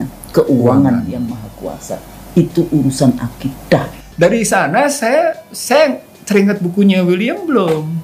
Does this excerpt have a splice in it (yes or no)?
yes